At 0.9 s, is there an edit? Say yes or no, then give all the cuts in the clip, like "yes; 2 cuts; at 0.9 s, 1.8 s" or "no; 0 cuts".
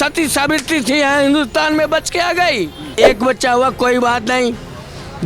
no; 1 cut; at 2.8 s